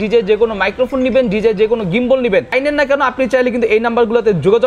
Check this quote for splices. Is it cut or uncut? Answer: cut